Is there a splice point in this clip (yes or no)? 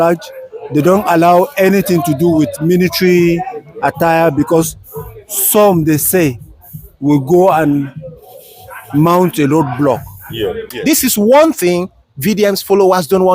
yes